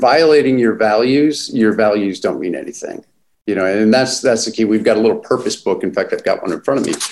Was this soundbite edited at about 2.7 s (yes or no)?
no